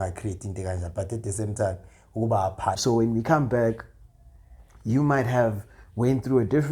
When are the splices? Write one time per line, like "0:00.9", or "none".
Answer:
0:02.8